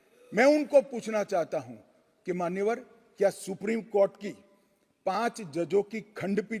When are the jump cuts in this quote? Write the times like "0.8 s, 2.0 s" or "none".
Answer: none